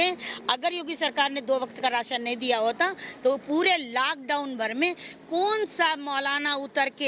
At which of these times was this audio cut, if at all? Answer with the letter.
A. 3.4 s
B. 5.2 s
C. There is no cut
C